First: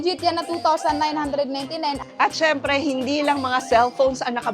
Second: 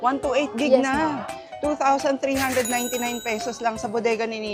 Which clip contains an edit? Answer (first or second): first